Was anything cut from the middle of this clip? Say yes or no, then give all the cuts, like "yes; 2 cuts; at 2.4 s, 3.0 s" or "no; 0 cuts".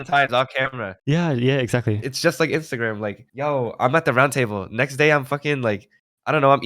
yes; 1 cut; at 2.1 s